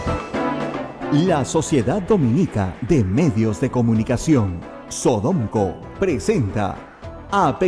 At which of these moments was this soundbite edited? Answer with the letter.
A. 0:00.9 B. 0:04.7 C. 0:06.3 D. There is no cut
A